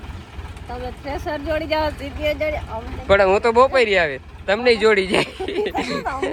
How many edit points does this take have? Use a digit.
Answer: 0